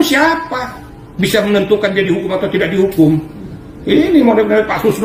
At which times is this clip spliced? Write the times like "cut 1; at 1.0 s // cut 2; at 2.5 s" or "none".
none

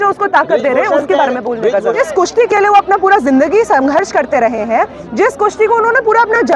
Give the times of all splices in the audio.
cut 1; at 2.0 s

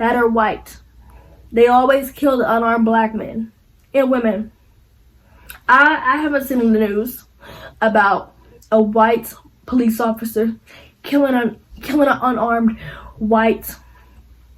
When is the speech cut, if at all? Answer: none

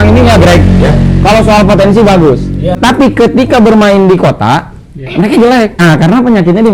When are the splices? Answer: cut 1; at 2.8 s // cut 2; at 5.8 s

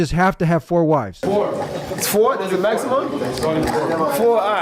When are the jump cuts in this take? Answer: cut 1; at 1.1 s

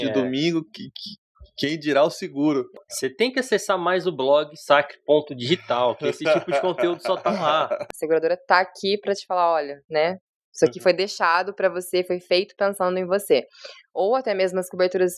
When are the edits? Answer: cut 1; at 2.8 s // cut 2; at 7.8 s

